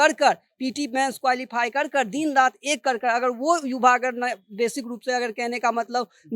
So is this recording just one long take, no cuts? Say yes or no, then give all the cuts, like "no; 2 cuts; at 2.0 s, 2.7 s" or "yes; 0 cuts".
yes; 0 cuts